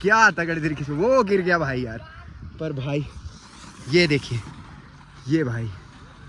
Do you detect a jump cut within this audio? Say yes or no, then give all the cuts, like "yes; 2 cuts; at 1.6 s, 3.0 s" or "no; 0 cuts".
no; 0 cuts